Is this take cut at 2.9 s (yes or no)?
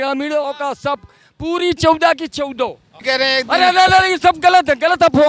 yes